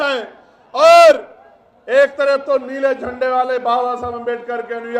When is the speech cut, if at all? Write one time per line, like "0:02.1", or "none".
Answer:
none

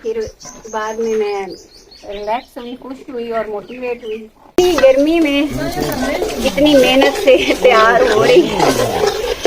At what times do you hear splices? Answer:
0:04.6

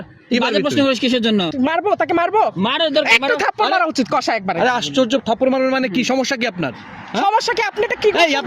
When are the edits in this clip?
0:01.5

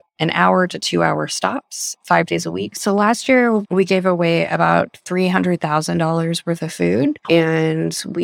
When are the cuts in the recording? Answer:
0:02.8
0:07.2

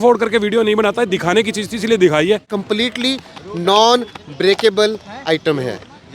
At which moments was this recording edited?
0:02.5

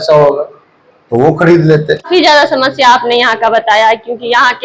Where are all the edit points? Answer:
0:02.0

